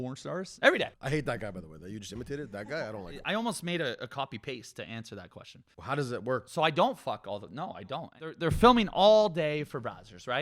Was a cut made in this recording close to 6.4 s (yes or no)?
no